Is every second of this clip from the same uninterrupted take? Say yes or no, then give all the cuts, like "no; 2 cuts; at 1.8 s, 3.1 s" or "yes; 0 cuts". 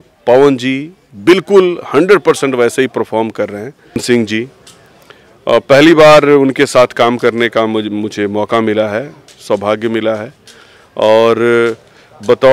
no; 1 cut; at 4.0 s